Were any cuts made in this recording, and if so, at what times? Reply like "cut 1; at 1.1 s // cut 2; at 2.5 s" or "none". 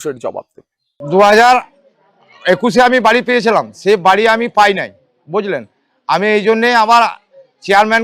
cut 1; at 1.0 s